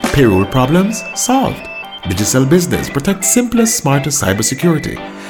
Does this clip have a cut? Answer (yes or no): no